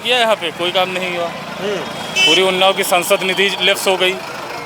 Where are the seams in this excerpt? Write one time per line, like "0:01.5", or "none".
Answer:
none